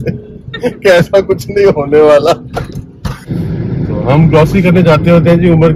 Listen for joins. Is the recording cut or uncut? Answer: cut